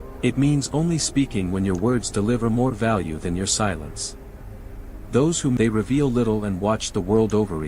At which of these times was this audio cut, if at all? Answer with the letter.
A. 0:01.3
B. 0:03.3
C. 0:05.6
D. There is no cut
C